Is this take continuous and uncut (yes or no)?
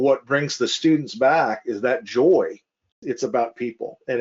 no